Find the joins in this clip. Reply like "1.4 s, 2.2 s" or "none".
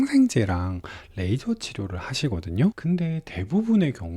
2.8 s